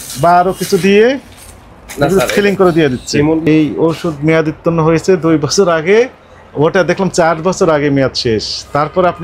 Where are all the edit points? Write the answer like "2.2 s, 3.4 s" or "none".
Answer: 3.4 s